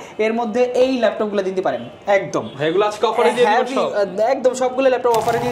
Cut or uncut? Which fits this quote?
uncut